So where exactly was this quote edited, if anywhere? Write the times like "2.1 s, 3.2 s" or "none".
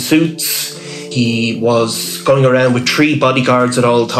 1.0 s

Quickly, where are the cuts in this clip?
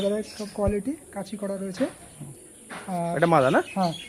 none

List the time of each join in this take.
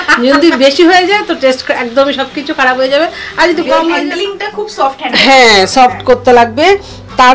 3.9 s

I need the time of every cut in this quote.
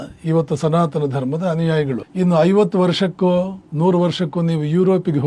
2.1 s, 3.6 s

